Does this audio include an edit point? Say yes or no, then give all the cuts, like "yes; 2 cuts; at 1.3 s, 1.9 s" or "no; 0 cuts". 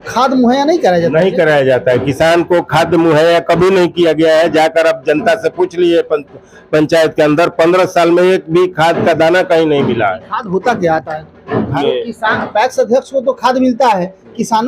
yes; 1 cut; at 11.8 s